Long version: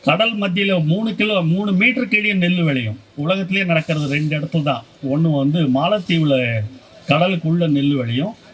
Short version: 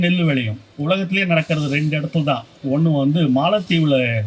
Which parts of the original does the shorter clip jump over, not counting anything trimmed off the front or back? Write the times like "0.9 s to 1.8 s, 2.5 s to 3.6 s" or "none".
none